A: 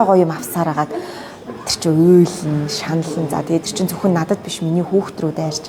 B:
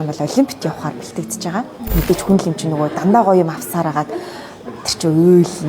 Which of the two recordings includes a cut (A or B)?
B